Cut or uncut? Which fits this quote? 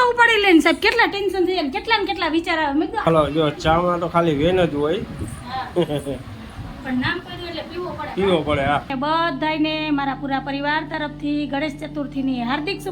cut